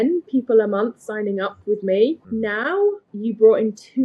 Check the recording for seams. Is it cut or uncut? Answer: cut